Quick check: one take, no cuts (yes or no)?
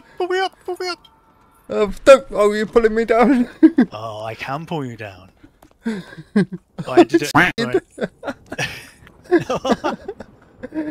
yes